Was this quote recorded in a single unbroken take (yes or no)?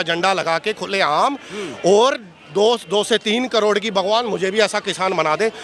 yes